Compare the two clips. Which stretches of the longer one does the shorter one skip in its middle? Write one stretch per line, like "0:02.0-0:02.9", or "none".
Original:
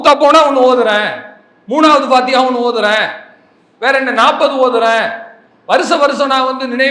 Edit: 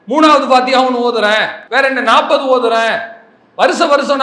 0:03.2-0:03.7